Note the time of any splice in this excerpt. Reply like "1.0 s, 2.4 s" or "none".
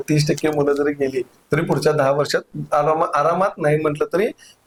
none